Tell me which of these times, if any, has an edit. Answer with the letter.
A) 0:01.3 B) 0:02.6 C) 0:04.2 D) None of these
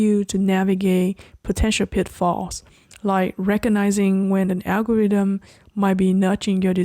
D